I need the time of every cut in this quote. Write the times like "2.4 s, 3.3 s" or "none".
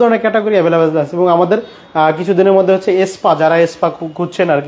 none

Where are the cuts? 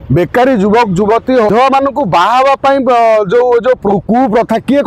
1.5 s

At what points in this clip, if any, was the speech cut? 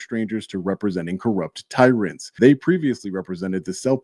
2.2 s

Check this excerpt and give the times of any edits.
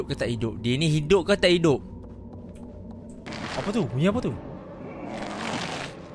3.3 s

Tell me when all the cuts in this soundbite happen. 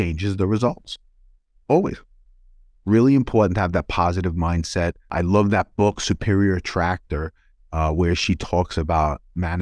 5.0 s

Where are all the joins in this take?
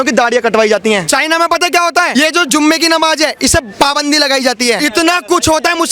1.0 s, 2.1 s, 4.8 s

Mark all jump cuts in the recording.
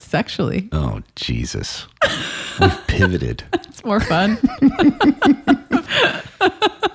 5.9 s

